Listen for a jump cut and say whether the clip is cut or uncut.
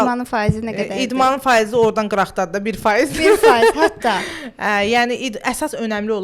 uncut